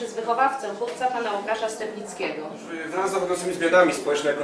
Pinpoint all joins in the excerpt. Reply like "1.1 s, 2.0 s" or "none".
2.9 s